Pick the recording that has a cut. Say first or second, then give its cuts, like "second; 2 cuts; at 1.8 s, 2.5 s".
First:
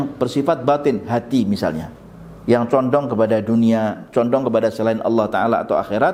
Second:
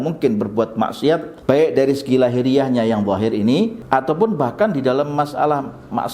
second; 2 cuts; at 1.3 s, 3.8 s